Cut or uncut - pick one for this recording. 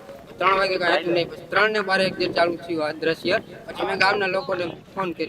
uncut